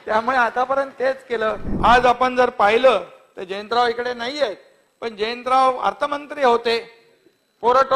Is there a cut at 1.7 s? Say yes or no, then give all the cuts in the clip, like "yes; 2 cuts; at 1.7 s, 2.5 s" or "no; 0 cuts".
yes; 1 cut; at 1.7 s